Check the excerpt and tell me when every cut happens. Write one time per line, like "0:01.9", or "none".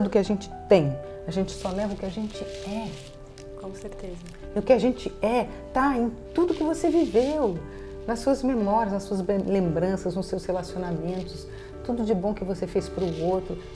none